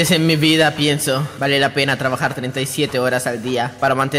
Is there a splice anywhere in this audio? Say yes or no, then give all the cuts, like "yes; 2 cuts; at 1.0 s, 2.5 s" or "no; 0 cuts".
no; 0 cuts